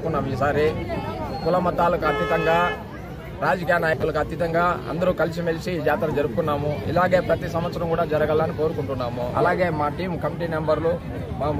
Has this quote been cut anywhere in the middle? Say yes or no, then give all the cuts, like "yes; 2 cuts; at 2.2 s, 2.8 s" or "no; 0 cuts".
yes; 1 cut; at 9.3 s